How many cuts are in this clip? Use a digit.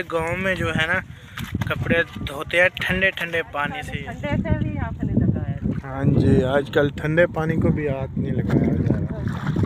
1